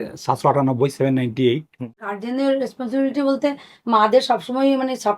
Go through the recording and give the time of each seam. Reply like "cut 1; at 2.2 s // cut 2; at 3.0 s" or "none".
cut 1; at 1.9 s